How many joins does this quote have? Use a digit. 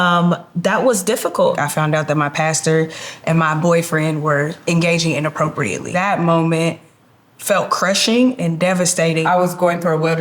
3